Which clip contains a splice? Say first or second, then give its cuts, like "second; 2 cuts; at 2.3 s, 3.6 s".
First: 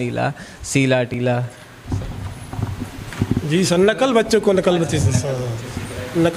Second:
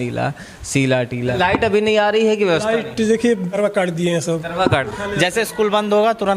second; 3 cuts; at 1.1 s, 3.5 s, 4.9 s